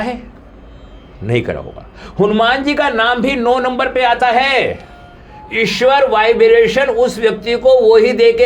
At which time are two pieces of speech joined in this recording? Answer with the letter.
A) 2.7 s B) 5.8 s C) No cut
C